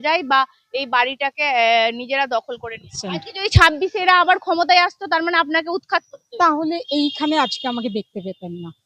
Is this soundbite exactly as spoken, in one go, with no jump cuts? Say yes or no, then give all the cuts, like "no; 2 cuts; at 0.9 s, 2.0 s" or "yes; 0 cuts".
no; 1 cut; at 3.0 s